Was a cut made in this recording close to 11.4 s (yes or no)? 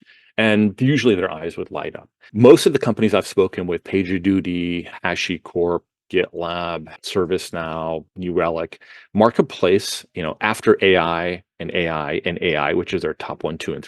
no